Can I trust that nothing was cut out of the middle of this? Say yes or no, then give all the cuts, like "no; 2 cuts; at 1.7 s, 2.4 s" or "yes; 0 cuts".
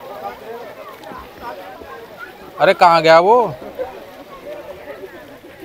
yes; 0 cuts